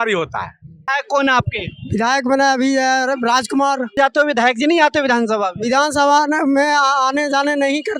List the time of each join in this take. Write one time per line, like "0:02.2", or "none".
0:01.0
0:04.0